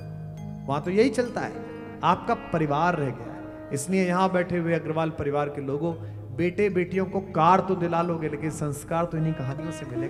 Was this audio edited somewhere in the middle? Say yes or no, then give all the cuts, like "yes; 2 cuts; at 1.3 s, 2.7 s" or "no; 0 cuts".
no; 0 cuts